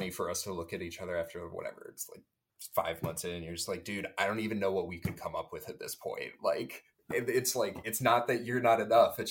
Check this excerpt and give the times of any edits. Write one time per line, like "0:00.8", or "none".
none